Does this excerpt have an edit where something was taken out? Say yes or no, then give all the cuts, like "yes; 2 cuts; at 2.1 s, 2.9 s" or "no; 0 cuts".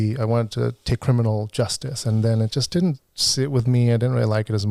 no; 0 cuts